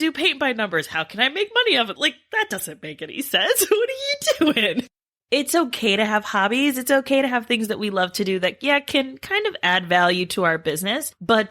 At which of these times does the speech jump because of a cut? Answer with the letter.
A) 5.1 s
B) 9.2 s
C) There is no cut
A